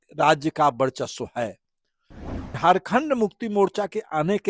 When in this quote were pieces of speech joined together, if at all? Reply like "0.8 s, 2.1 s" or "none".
2.1 s